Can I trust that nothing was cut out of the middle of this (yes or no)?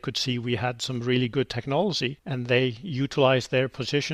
yes